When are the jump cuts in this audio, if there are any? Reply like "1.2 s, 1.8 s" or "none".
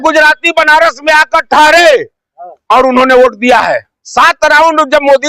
4.0 s